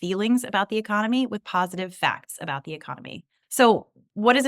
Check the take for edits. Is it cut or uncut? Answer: cut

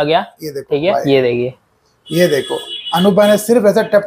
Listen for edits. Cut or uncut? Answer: cut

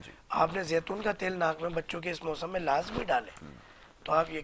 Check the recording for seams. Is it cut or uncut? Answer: uncut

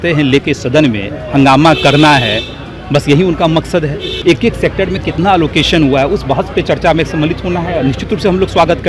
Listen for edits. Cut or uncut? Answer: cut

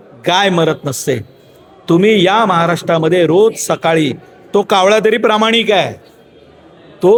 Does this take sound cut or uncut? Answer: uncut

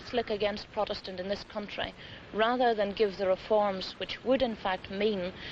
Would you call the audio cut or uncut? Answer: cut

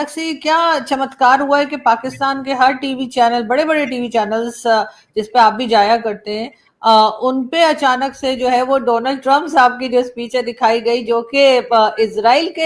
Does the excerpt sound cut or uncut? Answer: uncut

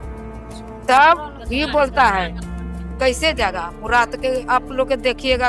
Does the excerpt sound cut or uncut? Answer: uncut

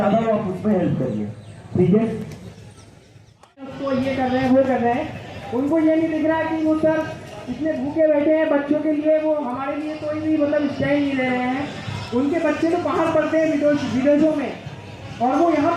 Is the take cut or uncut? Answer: cut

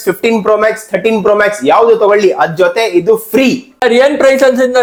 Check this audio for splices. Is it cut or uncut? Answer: uncut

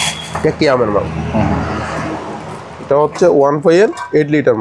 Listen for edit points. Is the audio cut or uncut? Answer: uncut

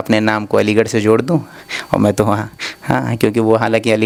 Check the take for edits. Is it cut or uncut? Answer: uncut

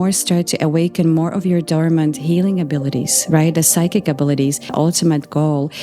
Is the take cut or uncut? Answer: cut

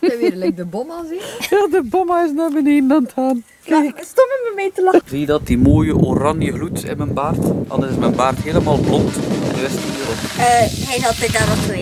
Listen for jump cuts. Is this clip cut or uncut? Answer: cut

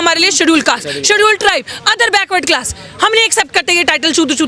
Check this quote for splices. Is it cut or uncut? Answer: uncut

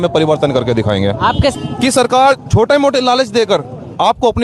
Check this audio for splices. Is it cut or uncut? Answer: cut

